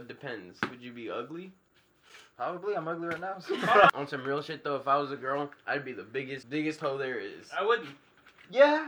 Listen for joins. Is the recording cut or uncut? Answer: cut